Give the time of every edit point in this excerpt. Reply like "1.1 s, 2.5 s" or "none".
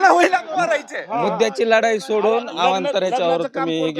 none